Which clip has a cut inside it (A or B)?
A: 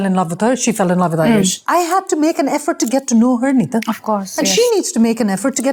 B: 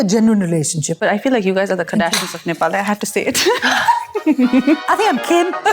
B